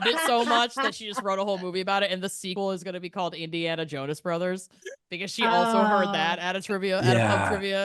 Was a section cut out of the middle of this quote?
yes; 1 cut; at 2.4 s

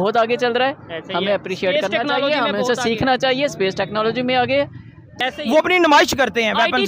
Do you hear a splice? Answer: yes; 1 cut; at 5.1 s

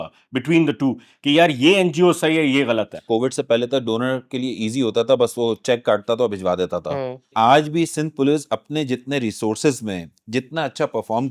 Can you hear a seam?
yes; 2 cuts; at 3.1 s, 7.3 s

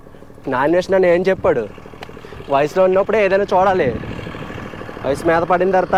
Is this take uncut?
yes; 0 cuts

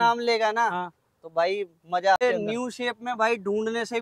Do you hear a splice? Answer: yes; 1 cut; at 2.2 s

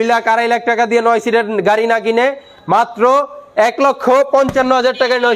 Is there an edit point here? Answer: no; 0 cuts

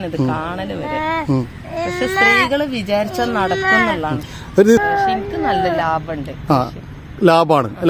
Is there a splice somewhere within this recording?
yes; 1 cut; at 4.8 s

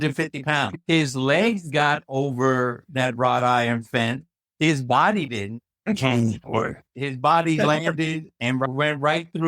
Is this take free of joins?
no; 1 cut; at 6.8 s

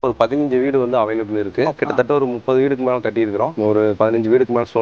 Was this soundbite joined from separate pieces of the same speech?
yes; 1 cut; at 1.8 s

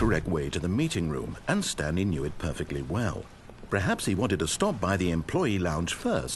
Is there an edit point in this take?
no; 0 cuts

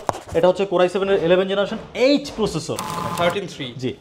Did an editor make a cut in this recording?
yes; 1 cut; at 2.8 s

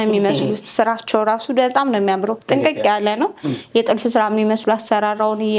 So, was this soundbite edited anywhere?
no; 0 cuts

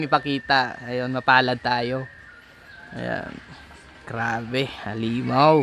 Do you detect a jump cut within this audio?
no; 0 cuts

